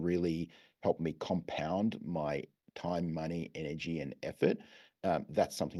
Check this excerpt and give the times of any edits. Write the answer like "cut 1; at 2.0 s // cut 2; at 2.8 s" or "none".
none